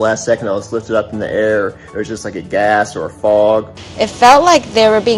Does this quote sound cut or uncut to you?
cut